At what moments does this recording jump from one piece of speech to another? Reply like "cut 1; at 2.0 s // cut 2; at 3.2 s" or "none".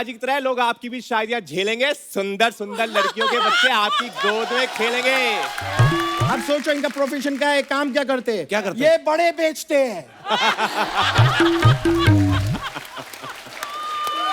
cut 1; at 6.2 s